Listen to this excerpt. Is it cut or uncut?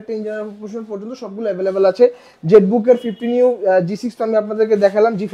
uncut